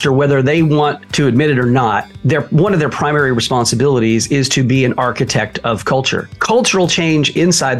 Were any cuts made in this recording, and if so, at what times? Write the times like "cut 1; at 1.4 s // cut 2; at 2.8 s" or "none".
cut 1; at 1.0 s // cut 2; at 2.1 s // cut 3; at 6.3 s